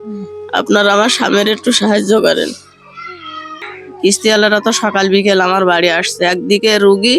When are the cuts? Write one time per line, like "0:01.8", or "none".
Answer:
0:04.0